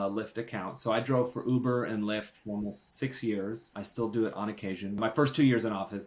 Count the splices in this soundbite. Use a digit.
2